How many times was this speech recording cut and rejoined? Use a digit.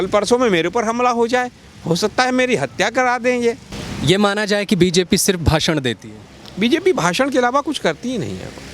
0